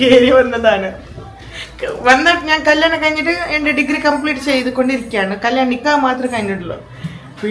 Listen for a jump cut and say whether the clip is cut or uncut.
uncut